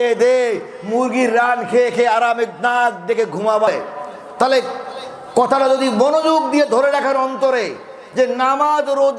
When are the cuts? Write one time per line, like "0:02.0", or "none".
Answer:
0:03.7